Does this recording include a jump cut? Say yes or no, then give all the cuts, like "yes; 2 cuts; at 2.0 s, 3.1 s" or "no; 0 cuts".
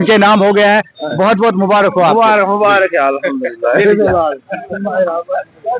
no; 0 cuts